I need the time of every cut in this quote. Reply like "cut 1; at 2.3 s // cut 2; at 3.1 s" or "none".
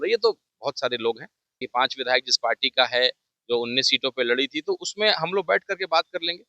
cut 1; at 1.7 s

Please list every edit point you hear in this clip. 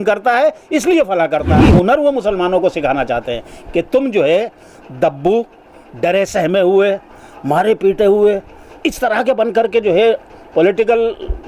cut 1; at 1.6 s

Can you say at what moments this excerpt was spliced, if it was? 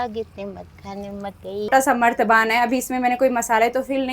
cut 1; at 1.7 s

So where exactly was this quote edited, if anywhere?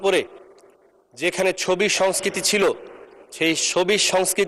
none

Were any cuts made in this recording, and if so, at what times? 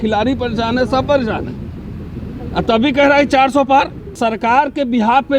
cut 1; at 4.1 s

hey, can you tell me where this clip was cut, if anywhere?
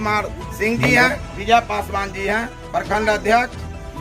cut 1; at 1.3 s

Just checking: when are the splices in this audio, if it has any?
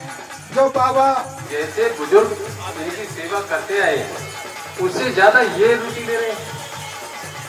cut 1; at 1.4 s

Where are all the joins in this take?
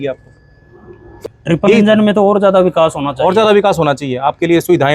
cut 1; at 1.2 s

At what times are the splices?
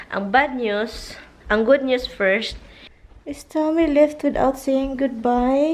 cut 1; at 3.1 s

